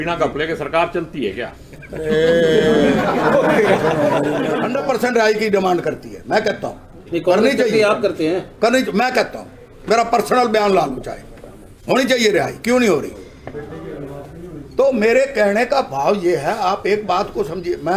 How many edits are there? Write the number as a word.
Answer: one